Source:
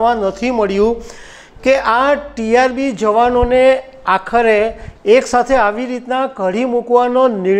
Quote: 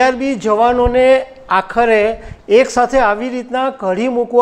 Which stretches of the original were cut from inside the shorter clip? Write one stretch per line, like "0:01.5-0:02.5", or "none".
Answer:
none